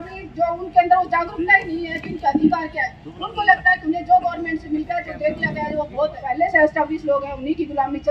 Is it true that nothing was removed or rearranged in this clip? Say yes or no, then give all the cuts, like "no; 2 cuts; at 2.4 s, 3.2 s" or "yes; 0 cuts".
no; 1 cut; at 6.2 s